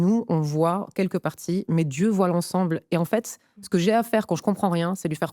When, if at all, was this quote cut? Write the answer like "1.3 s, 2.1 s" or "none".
none